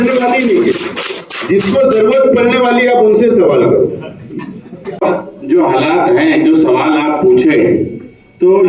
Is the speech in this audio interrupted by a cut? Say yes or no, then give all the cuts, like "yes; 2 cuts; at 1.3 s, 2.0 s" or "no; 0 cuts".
yes; 1 cut; at 5.0 s